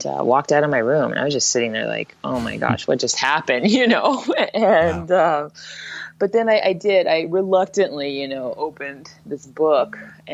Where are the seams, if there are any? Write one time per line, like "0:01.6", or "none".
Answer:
none